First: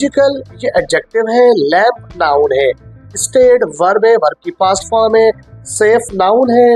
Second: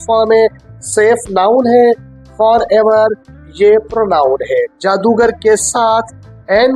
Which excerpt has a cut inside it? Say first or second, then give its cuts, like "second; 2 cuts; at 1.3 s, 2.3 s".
second; 1 cut; at 4.7 s